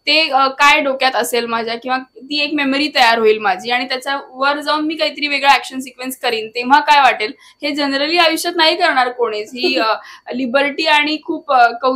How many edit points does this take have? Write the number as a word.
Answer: zero